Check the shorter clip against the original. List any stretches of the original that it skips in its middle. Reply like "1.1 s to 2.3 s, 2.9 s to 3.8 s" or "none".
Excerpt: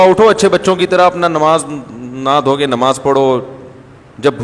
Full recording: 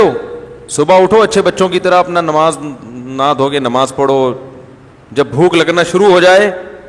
none